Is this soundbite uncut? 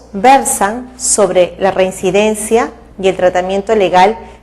no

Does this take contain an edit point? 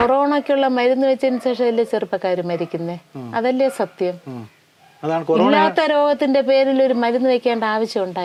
no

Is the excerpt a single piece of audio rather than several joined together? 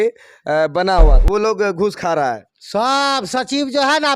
no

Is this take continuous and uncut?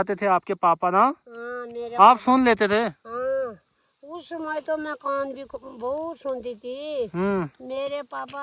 yes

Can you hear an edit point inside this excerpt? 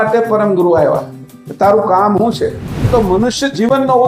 yes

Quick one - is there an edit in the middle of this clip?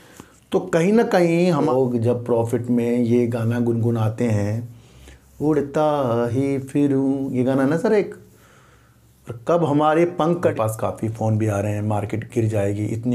yes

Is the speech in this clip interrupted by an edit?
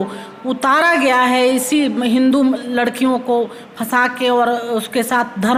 no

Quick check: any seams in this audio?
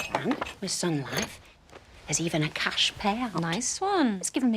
yes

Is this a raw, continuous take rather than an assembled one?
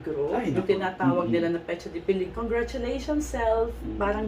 no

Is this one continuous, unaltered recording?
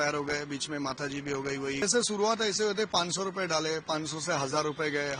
no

